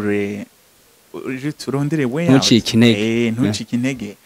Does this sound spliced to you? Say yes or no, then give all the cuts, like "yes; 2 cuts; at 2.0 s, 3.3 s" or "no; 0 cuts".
no; 0 cuts